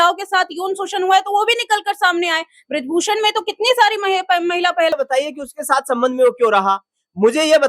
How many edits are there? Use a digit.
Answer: 1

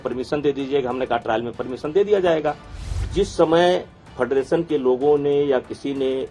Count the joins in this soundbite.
1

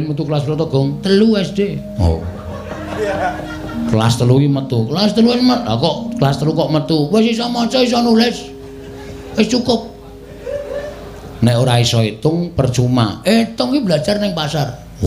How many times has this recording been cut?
0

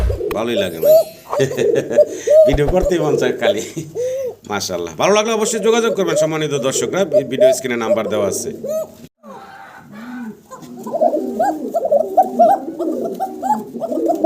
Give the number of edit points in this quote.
1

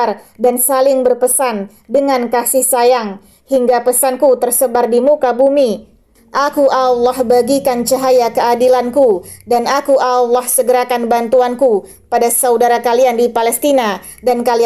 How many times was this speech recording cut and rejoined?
0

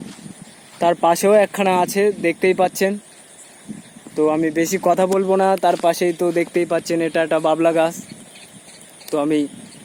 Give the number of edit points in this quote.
0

